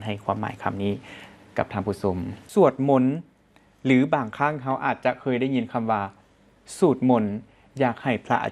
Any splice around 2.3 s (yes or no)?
yes